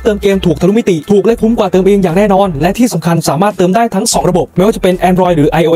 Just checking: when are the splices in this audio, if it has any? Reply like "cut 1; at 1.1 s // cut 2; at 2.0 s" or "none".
none